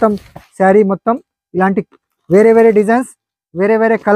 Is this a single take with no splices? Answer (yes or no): yes